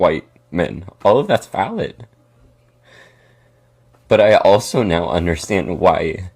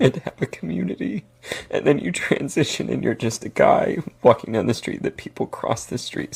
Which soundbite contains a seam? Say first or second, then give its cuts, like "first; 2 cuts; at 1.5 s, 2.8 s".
first; 1 cut; at 2.1 s